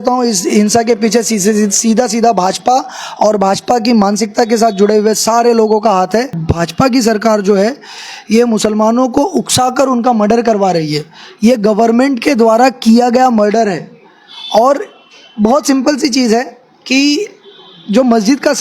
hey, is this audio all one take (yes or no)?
no